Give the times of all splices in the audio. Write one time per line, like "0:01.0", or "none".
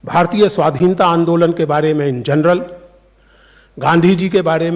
none